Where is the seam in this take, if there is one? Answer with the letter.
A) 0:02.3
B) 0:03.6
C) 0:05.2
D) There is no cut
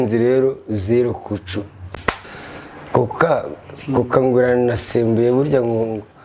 A